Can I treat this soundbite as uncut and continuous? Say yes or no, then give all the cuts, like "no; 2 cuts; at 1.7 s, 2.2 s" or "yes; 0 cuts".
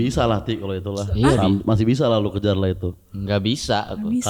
yes; 0 cuts